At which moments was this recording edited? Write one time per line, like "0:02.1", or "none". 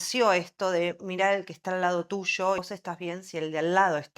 0:02.6